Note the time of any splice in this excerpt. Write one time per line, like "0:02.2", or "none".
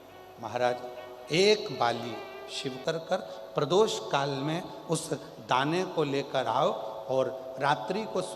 0:02.8

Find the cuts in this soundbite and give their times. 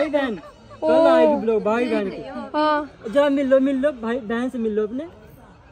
none

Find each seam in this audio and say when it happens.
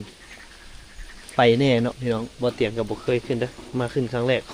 none

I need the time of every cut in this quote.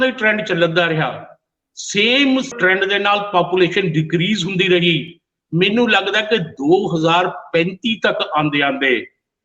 0:02.5

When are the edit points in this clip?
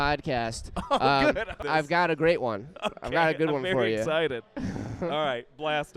0:01.6

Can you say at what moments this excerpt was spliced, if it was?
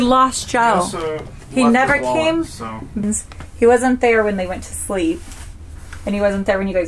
0:03.0

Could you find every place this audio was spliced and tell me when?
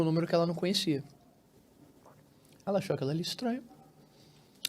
0:01.3

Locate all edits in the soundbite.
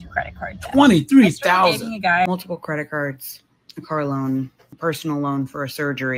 0:02.3
0:04.6

